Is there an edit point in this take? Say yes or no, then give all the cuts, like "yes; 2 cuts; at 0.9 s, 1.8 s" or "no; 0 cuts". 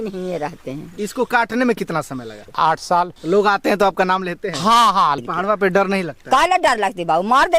yes; 4 cuts; at 0.9 s, 2.3 s, 3.2 s, 5.2 s